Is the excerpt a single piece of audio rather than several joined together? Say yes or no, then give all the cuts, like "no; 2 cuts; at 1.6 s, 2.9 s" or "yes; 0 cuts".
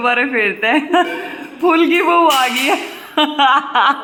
yes; 0 cuts